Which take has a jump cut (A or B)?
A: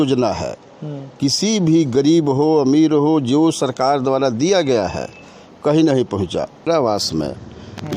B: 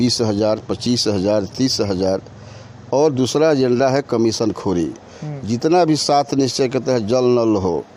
A